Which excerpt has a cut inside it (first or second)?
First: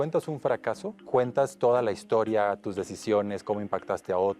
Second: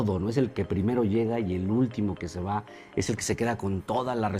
first